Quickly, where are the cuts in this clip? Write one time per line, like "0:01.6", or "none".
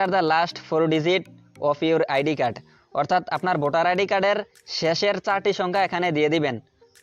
none